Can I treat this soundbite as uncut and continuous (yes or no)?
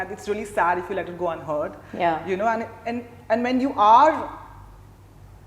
yes